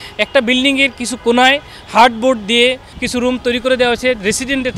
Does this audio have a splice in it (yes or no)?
yes